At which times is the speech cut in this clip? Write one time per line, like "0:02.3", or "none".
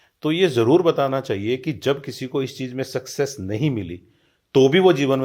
none